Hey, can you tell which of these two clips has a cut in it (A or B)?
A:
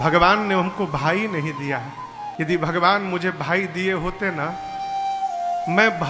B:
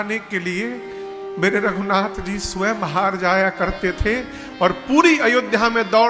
A